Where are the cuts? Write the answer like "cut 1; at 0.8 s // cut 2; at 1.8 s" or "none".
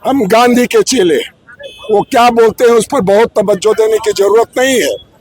none